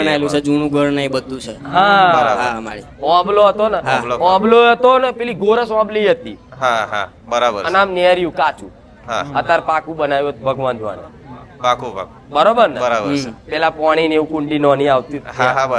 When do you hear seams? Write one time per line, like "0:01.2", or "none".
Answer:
none